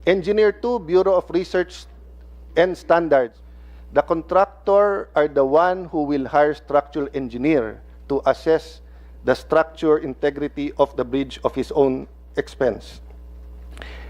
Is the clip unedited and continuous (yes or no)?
no